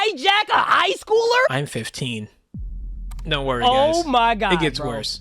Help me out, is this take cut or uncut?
cut